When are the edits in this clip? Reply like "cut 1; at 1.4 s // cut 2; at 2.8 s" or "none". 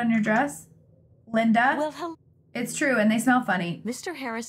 cut 1; at 2.0 s

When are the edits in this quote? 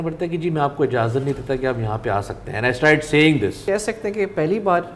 cut 1; at 3.6 s

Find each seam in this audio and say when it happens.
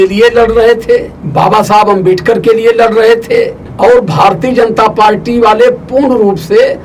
cut 1; at 1.2 s // cut 2; at 3.6 s

